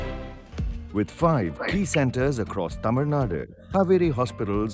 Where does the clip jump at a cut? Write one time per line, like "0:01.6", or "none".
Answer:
0:03.5